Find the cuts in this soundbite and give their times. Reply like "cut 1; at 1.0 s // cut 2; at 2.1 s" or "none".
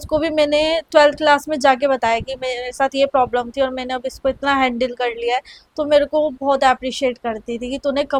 none